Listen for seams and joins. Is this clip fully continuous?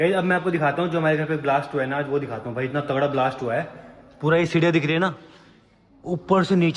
yes; 0 cuts

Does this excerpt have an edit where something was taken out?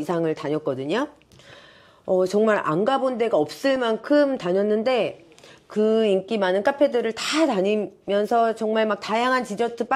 no; 0 cuts

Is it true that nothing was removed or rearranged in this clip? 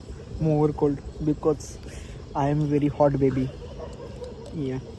yes; 0 cuts

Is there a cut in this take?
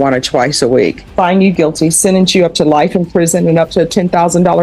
yes; 1 cut; at 1.0 s

